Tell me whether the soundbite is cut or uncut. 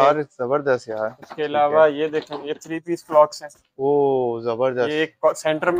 uncut